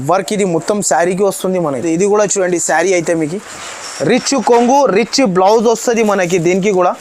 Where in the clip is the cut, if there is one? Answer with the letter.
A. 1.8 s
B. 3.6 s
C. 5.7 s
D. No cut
A